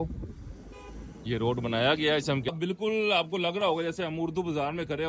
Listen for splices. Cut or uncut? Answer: cut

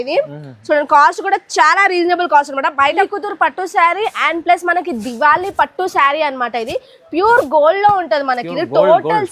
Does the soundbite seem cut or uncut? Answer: cut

